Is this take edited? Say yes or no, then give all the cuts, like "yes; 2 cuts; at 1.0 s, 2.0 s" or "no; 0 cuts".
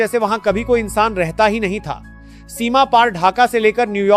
no; 0 cuts